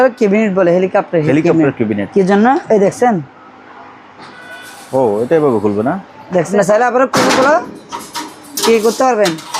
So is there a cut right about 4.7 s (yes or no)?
no